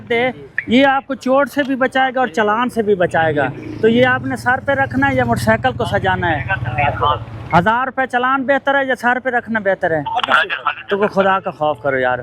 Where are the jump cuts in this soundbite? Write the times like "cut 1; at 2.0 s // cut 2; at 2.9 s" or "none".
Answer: none